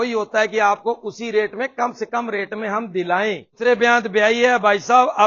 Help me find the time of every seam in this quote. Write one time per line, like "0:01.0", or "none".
0:03.6